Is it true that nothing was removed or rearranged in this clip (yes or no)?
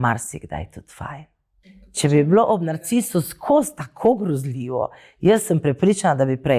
no